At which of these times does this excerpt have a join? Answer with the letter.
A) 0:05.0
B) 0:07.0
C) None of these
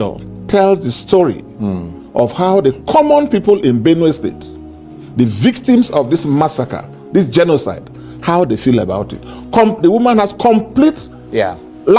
C